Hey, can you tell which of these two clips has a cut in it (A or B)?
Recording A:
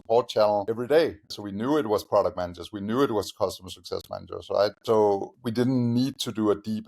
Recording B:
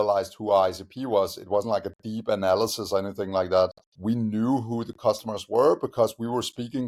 A